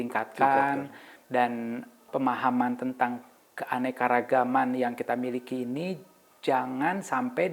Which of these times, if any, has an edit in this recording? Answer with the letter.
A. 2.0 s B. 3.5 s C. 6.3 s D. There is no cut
A